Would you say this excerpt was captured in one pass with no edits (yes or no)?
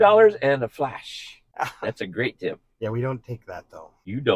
no